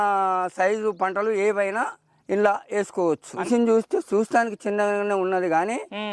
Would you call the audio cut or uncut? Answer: cut